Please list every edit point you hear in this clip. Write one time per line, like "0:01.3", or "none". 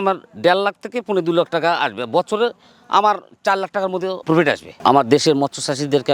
0:04.7